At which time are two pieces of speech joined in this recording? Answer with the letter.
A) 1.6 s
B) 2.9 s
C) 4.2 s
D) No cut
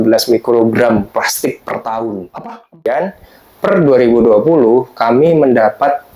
B